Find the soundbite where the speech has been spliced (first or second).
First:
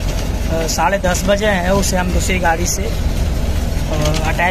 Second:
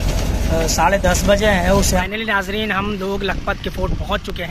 second